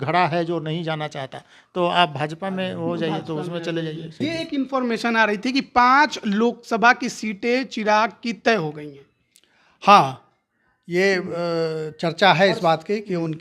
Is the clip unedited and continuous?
no; 1 cut; at 4.2 s

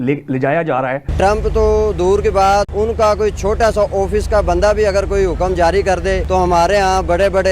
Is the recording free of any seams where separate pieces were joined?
no; 3 cuts; at 1.1 s, 2.7 s, 6.2 s

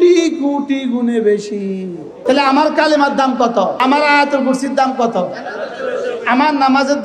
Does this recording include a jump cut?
yes; 2 cuts; at 2.2 s, 3.8 s

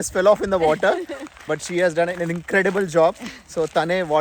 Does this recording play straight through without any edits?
no; 1 cut; at 1.3 s

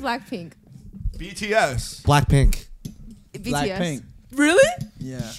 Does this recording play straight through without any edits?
no; 1 cut; at 3.3 s

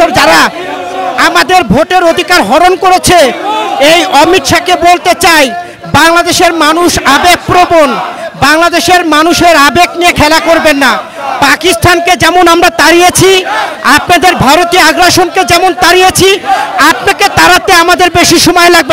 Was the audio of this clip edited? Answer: no; 0 cuts

